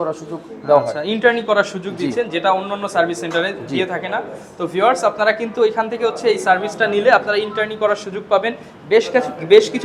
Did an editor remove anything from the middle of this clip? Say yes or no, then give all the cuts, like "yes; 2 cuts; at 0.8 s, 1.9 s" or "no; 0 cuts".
no; 0 cuts